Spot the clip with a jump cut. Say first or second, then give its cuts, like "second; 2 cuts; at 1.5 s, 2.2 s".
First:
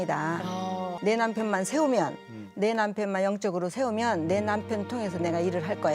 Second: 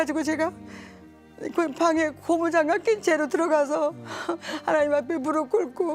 first; 1 cut; at 0.9 s